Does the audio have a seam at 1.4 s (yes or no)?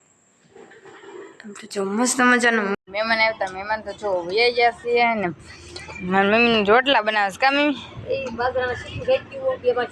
no